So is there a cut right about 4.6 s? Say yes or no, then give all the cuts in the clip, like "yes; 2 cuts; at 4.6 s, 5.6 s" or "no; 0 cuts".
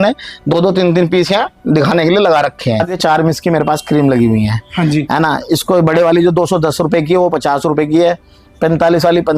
no; 1 cut; at 2.9 s